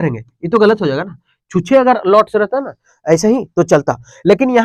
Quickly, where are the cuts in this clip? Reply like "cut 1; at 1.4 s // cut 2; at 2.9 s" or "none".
none